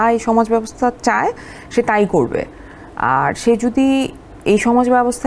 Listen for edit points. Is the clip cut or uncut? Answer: uncut